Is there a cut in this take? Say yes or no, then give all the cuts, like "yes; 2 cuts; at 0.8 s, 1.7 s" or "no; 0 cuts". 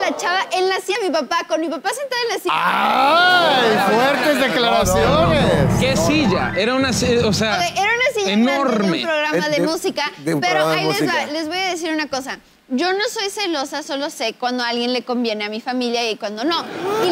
yes; 1 cut; at 0.9 s